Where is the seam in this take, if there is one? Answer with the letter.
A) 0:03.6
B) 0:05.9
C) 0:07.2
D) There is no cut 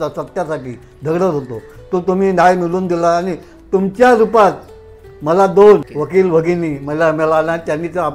B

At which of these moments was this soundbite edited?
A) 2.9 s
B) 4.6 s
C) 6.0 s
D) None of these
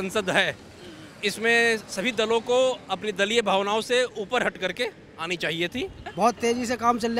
C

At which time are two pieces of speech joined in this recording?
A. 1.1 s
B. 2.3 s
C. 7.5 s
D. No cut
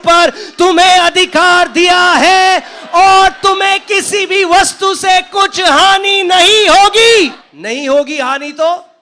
C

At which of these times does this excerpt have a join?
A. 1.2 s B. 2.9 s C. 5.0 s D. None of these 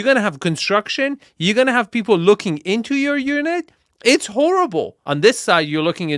C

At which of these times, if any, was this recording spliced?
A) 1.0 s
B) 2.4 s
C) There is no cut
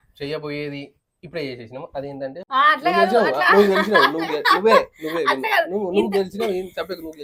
B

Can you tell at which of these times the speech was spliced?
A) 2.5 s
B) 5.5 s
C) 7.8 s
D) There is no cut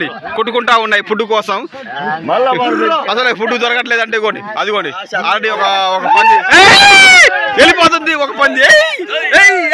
B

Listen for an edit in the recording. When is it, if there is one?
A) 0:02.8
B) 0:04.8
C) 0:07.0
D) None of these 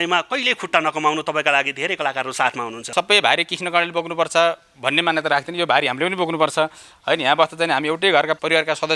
A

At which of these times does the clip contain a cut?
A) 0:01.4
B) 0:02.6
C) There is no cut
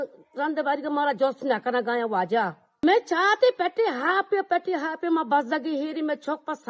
B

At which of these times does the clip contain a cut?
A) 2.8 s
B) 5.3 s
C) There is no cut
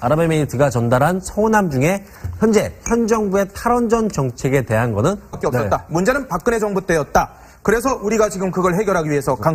C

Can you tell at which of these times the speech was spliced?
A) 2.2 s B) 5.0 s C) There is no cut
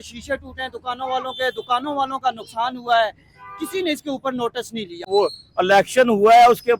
B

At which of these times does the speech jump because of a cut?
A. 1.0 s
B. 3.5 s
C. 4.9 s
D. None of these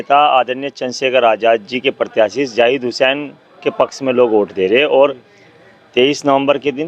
D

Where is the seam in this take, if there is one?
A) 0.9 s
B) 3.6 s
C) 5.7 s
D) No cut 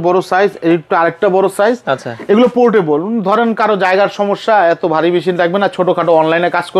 D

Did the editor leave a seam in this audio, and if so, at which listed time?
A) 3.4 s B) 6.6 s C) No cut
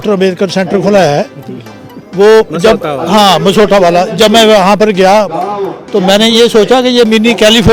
C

